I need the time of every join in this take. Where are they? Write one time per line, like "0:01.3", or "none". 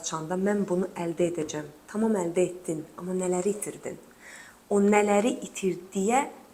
none